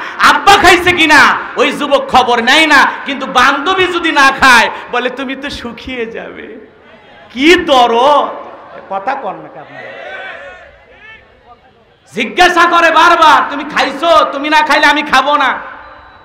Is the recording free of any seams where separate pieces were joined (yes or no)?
yes